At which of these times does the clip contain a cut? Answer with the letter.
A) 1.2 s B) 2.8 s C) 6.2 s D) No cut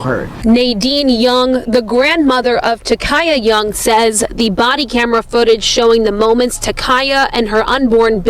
A